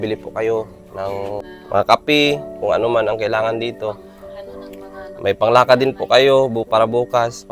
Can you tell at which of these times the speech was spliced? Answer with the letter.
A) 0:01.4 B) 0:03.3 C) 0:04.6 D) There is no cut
A